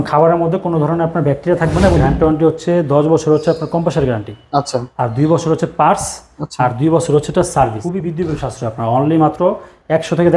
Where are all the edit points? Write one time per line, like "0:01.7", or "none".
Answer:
0:02.0
0:07.8